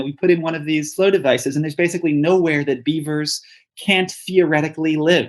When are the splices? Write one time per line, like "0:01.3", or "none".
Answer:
0:00.9